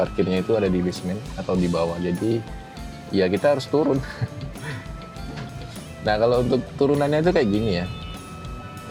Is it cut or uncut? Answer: uncut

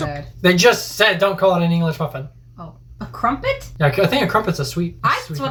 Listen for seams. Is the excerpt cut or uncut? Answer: uncut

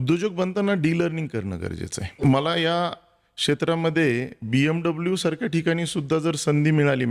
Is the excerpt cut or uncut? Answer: cut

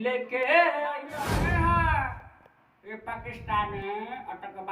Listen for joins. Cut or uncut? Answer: cut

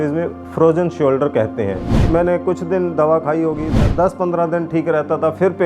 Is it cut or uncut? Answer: cut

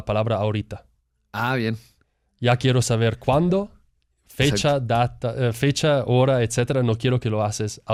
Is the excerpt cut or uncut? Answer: uncut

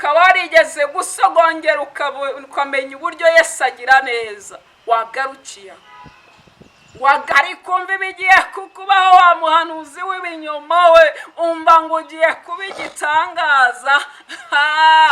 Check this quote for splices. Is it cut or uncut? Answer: cut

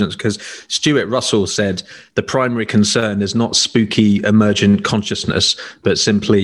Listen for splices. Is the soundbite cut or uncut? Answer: uncut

